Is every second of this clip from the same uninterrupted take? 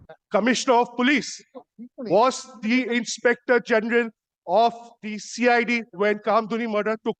yes; 0 cuts

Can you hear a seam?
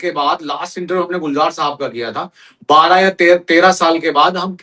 no; 0 cuts

